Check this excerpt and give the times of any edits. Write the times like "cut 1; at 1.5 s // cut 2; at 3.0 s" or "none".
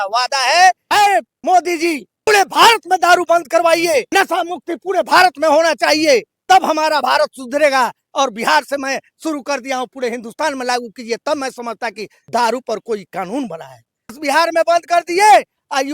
cut 1; at 1.1 s // cut 2; at 2.3 s // cut 3; at 4.1 s // cut 4; at 6.3 s // cut 5; at 12.1 s // cut 6; at 14.2 s